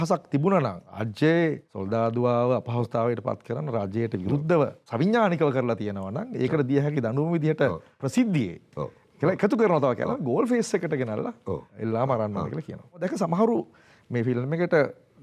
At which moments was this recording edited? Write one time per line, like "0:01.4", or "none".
0:00.9
0:01.7
0:04.8
0:07.9
0:11.7
0:13.0